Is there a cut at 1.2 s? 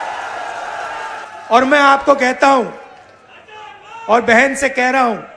yes; 1 cut; at 1.2 s

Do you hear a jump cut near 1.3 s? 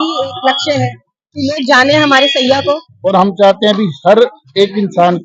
no; 1 cut; at 2.9 s

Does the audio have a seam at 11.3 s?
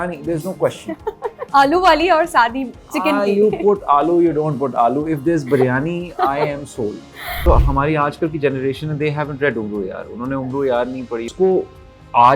yes; 3 cuts; at 1.4 s, 7.5 s, 11.3 s

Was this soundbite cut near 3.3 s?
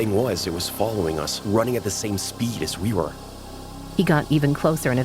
yes; 1 cut; at 3.3 s

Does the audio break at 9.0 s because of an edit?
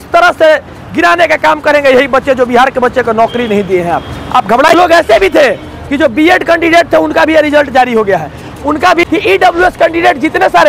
yes; 2 cuts; at 4.7 s, 9.0 s

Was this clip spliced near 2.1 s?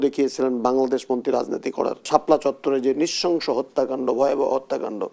yes; 1 cut; at 2.1 s

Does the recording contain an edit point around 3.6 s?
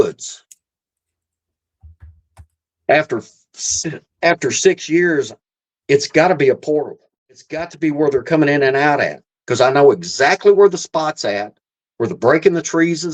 no; 1 cut; at 7.7 s

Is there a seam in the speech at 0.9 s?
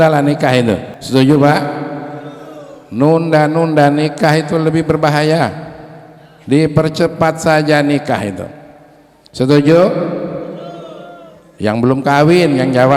yes; 1 cut; at 0.9 s

